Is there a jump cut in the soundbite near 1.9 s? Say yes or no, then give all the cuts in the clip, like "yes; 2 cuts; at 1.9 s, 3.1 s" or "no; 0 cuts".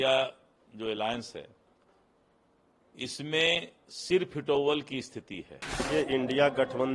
no; 1 cut; at 5.7 s